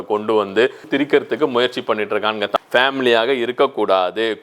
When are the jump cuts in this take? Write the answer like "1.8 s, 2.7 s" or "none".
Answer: 0.8 s, 2.6 s